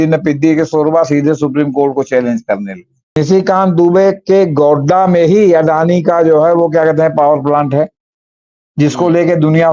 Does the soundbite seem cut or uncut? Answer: cut